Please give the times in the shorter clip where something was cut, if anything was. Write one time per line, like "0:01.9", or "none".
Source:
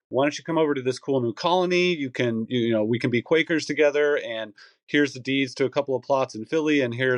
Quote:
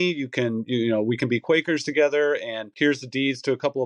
0:02.6